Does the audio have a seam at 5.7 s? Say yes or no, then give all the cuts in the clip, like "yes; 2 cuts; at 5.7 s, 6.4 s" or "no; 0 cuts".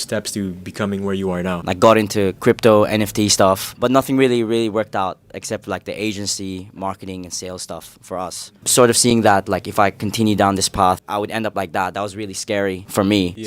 no; 3 cuts; at 1.6 s, 3.7 s, 8.6 s